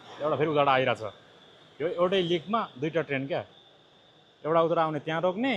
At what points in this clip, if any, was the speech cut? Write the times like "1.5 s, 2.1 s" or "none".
none